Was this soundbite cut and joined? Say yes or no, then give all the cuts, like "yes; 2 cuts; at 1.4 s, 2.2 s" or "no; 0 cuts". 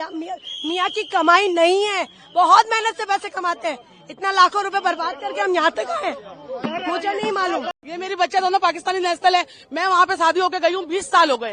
no; 0 cuts